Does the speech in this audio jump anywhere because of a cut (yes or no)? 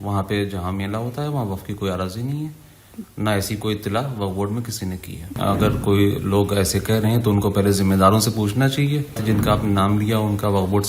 yes